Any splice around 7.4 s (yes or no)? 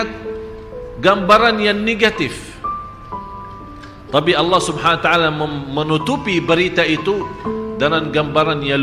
no